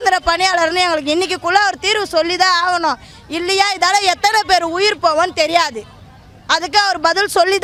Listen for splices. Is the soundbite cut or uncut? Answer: uncut